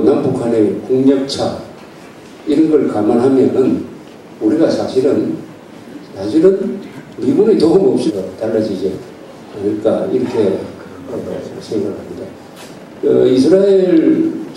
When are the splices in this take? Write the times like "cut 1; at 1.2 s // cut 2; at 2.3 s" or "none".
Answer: none

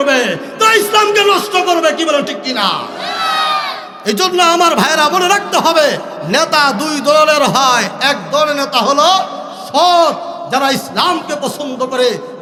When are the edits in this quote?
none

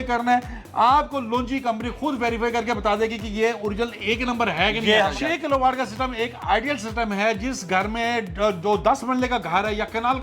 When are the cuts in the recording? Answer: cut 1; at 5.1 s

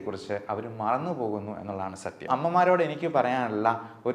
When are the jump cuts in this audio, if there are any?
cut 1; at 2.3 s

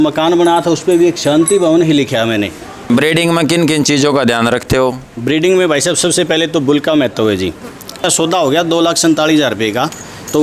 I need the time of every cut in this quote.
cut 1; at 2.7 s // cut 2; at 8.0 s

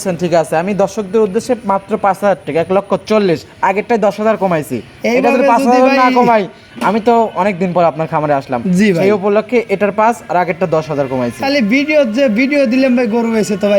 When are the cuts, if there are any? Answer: none

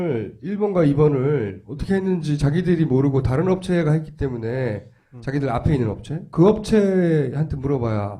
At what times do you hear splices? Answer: none

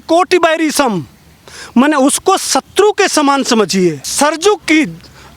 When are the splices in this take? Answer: cut 1; at 4.1 s

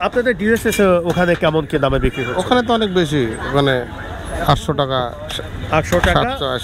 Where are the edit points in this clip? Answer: none

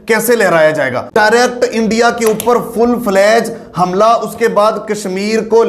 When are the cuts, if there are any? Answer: cut 1; at 1.0 s

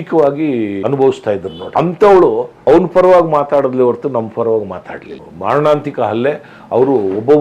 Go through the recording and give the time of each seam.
cut 1; at 0.8 s // cut 2; at 1.6 s // cut 3; at 2.5 s // cut 4; at 5.3 s

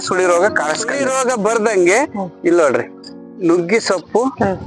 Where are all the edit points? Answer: cut 1; at 1.0 s

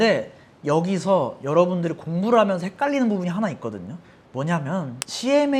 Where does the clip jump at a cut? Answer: none

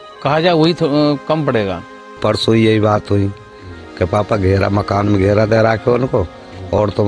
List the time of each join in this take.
cut 1; at 2.2 s

